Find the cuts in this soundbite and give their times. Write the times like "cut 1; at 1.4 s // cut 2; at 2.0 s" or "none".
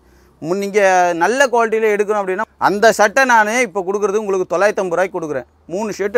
cut 1; at 2.4 s